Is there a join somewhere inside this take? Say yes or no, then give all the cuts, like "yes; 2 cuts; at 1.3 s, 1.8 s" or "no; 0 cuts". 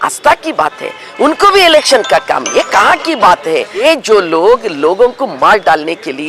yes; 1 cut; at 3.8 s